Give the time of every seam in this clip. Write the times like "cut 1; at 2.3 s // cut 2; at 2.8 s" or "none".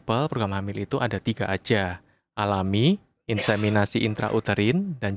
none

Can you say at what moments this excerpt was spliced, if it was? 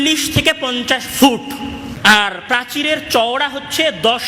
cut 1; at 1.9 s

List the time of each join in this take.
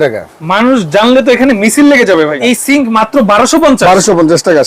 cut 1; at 2.4 s

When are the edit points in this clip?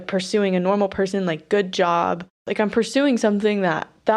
cut 1; at 2.5 s

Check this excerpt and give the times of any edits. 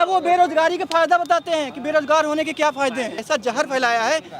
cut 1; at 3.2 s

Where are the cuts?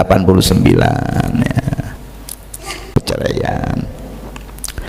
cut 1; at 2.9 s

